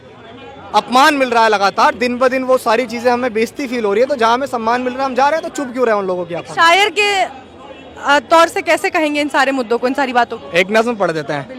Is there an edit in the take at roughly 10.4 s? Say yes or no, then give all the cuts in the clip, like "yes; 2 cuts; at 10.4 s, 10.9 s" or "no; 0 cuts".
no; 0 cuts